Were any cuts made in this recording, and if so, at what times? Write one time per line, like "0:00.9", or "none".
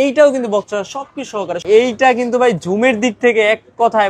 0:01.6